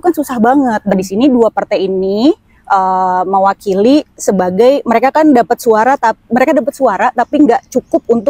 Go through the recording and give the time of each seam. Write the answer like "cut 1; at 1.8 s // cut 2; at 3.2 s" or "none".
cut 1; at 0.9 s